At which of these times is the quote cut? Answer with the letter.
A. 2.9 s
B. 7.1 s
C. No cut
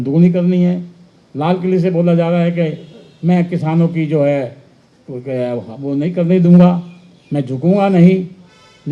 C